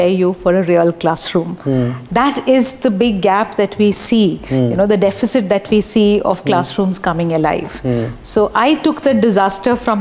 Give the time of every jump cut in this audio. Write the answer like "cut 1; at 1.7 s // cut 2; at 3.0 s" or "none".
none